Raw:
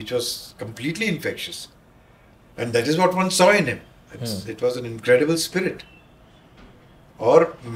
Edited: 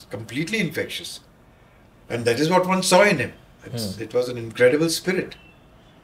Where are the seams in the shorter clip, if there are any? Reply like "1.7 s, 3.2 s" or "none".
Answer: none

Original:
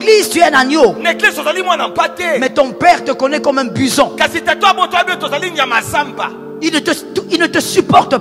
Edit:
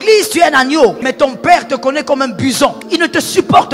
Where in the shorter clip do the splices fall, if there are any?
1.0 s, 2.8 s

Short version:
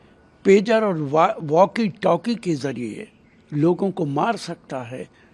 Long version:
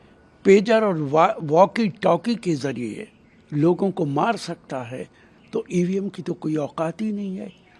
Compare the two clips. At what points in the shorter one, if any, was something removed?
none

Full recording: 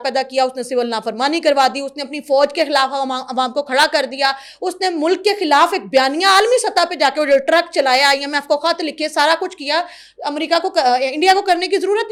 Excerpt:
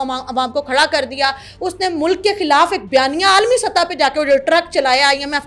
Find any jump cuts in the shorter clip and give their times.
none

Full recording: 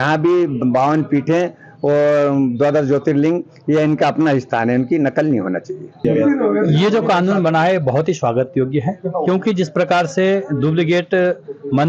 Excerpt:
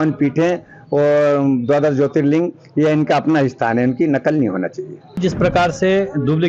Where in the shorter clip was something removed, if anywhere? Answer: 5.1 s

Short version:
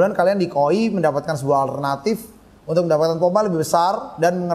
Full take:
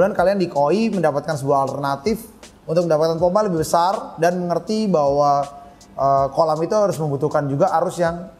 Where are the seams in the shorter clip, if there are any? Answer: none

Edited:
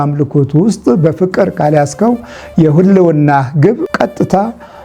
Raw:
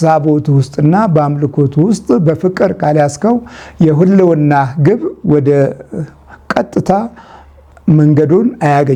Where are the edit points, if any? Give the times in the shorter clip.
3.9 s

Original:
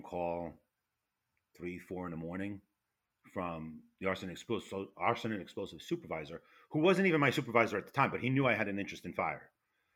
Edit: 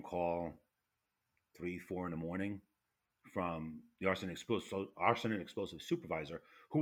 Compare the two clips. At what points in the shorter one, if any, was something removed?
none

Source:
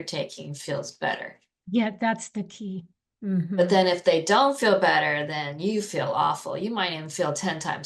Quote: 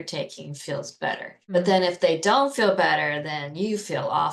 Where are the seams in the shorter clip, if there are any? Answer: 1.5 s

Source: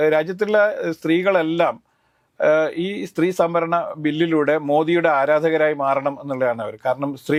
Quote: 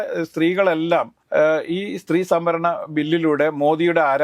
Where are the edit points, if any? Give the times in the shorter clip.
1.2 s

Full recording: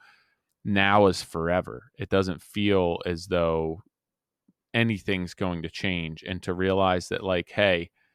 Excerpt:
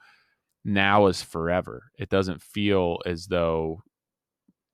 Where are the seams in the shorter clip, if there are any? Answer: none

